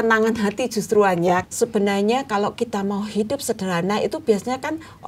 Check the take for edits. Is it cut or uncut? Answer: cut